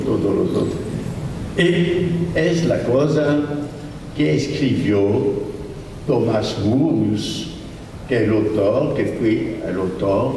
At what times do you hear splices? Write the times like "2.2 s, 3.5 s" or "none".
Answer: none